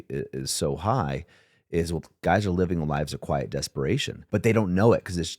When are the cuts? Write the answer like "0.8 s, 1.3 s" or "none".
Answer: 4.3 s